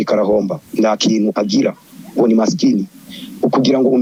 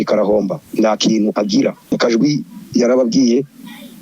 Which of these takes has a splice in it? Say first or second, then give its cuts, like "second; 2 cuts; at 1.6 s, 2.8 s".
second; 1 cut; at 1.9 s